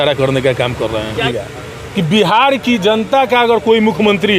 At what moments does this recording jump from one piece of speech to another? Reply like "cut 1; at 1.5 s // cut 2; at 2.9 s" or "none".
cut 1; at 1.2 s